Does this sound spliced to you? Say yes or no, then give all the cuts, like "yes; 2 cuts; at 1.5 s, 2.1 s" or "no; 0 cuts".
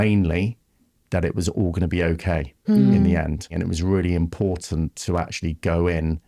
yes; 1 cut; at 3.5 s